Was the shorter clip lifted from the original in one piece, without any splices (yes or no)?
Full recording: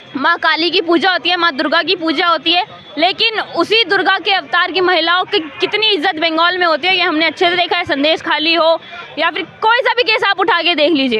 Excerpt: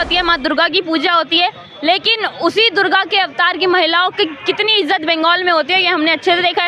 yes